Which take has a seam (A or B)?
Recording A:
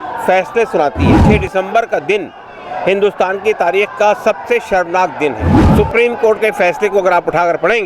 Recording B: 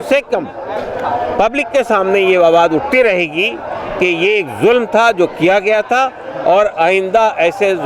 A